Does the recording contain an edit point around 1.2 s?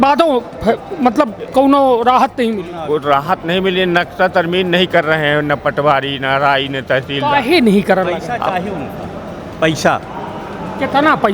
no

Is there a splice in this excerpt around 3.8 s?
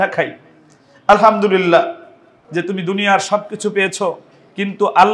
no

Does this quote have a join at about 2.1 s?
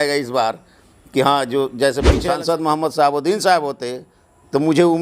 yes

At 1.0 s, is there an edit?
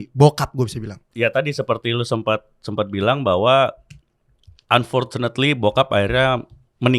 yes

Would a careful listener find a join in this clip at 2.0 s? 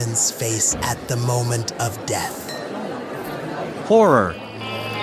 no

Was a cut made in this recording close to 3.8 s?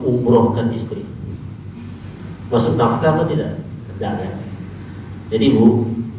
yes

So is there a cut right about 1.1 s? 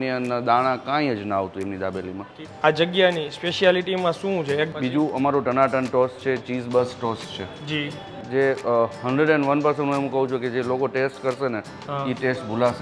no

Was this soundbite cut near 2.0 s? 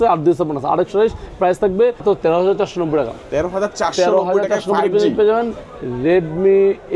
yes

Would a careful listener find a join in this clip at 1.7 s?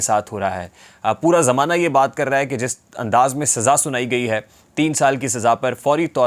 no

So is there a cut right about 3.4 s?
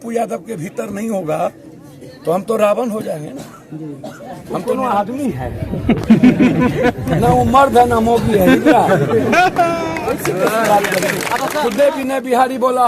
no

